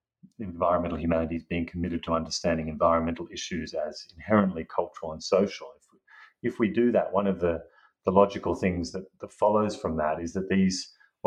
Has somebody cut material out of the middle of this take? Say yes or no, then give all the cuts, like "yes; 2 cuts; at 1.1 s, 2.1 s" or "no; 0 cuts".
no; 0 cuts